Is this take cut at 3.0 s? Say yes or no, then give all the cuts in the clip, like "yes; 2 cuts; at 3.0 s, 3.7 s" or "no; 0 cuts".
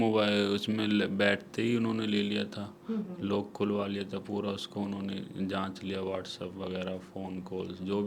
no; 0 cuts